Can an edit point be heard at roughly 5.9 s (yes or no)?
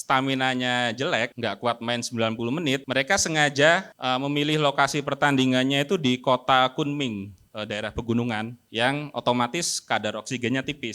no